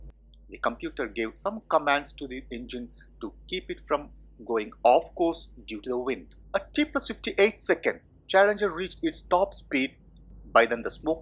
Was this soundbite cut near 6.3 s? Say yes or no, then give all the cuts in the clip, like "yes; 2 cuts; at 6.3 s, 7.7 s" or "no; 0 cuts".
yes; 1 cut; at 6.3 s